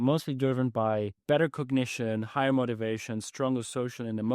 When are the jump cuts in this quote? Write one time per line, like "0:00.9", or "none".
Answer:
0:01.2